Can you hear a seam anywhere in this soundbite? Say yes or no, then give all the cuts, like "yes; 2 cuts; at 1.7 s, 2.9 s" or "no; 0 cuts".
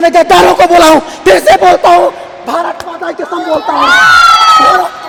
no; 0 cuts